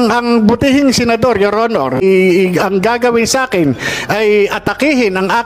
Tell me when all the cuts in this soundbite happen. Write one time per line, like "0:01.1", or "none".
0:02.0